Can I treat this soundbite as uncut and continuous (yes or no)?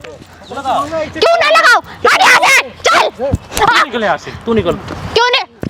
yes